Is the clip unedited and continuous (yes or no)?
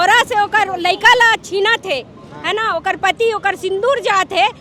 yes